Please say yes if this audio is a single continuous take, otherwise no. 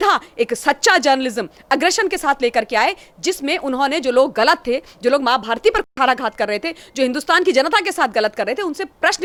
yes